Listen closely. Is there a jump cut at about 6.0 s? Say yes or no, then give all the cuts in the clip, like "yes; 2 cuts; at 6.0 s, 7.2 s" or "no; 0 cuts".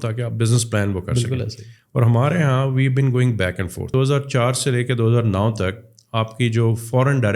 no; 1 cut; at 3.9 s